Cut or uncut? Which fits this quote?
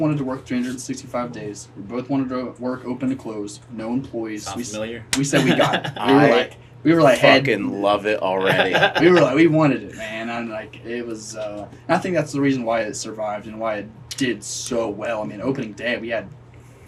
uncut